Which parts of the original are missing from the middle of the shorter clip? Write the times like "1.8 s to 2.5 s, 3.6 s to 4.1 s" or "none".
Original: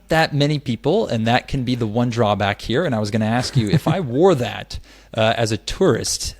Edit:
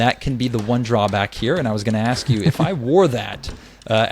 none